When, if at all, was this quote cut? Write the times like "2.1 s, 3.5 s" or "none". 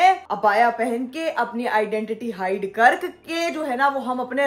none